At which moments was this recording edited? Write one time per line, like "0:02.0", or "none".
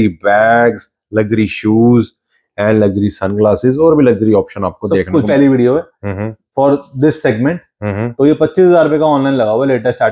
0:05.3